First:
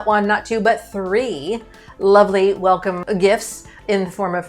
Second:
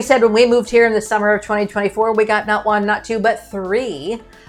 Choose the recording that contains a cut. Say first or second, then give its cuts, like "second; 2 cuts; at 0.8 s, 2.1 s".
first; 1 cut; at 3.0 s